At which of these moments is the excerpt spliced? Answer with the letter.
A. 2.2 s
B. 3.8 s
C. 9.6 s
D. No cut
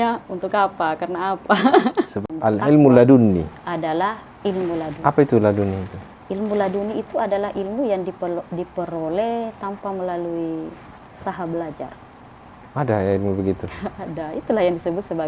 A